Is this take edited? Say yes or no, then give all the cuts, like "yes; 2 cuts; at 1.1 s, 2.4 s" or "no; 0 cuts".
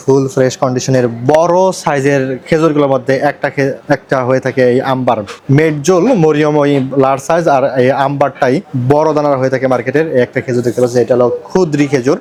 no; 0 cuts